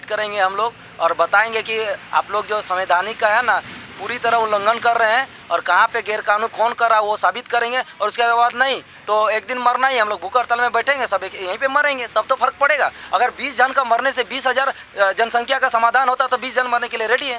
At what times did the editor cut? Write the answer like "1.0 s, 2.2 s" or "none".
none